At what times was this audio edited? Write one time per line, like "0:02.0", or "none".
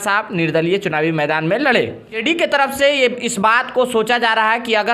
0:02.2